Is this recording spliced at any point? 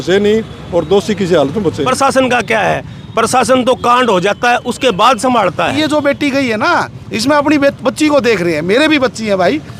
yes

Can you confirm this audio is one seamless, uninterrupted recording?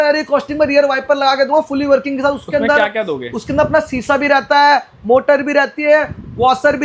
yes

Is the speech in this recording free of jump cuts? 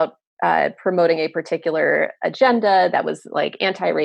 yes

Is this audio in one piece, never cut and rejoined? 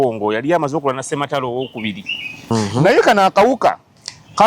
no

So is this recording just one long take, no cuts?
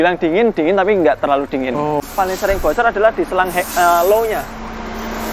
no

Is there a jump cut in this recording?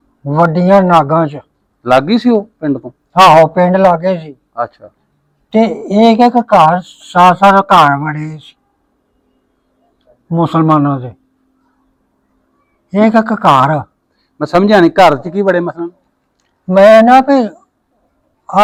no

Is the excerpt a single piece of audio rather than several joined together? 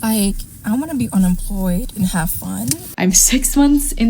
no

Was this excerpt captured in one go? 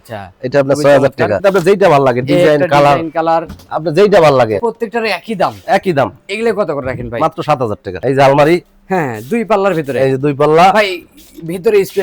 no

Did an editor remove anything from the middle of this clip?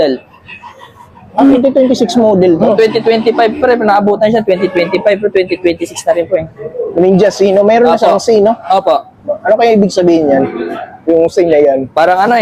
no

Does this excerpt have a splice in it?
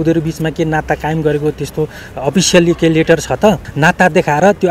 yes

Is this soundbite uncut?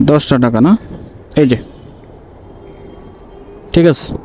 yes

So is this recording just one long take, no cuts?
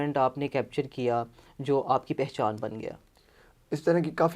yes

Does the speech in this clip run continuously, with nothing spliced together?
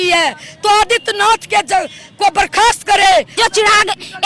no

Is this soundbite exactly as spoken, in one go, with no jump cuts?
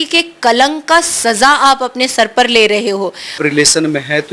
no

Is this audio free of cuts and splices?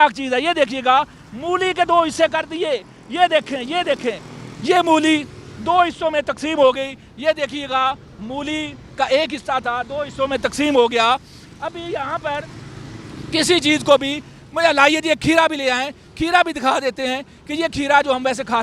yes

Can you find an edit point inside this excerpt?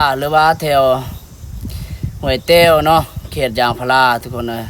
no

